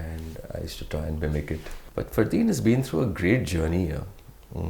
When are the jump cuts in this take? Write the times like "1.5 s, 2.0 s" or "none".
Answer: 1.8 s